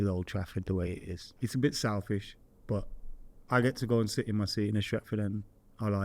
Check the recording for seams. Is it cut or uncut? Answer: cut